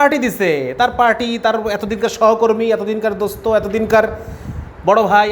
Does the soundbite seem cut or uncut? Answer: uncut